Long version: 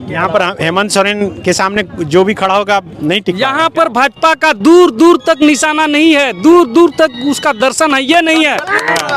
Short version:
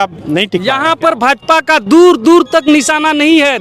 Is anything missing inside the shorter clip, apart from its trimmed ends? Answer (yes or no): no